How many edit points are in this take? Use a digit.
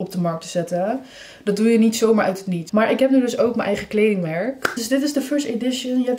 2